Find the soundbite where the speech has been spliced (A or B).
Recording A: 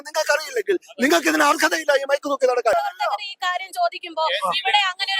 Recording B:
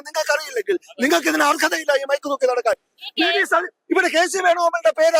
A